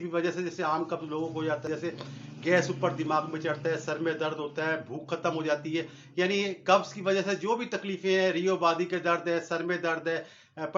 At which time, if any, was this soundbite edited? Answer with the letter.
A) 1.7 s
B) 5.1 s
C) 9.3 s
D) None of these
A